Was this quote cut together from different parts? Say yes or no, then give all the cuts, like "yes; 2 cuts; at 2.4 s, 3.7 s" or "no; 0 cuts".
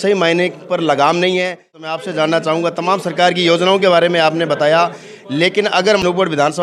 yes; 1 cut; at 1.8 s